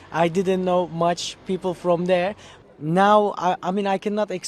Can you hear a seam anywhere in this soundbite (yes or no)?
yes